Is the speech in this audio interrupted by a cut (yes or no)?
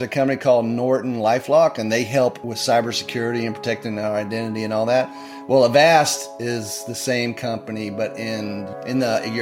yes